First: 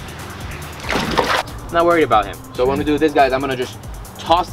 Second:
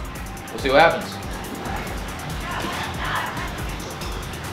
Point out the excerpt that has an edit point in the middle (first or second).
first